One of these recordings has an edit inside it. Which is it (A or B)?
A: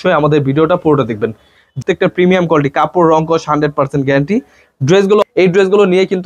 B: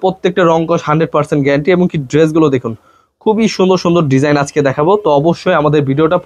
A